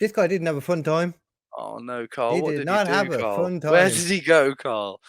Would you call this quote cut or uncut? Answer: uncut